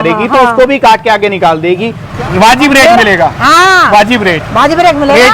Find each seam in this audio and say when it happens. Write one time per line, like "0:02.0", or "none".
0:02.0